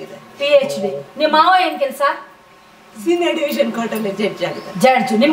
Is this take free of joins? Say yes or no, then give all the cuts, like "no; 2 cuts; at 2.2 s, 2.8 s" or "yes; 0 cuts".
yes; 0 cuts